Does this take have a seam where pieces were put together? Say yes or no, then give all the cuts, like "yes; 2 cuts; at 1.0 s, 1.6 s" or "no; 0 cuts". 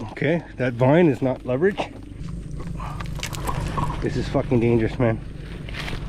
yes; 1 cut; at 2.1 s